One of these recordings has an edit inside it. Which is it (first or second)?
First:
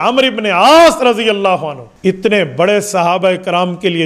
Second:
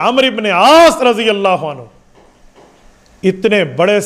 first